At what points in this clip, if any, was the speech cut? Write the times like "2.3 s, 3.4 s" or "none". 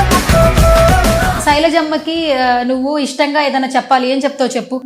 1.4 s